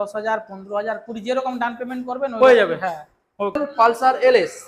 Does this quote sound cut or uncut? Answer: cut